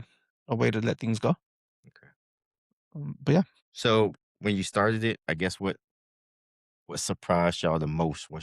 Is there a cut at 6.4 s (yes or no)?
no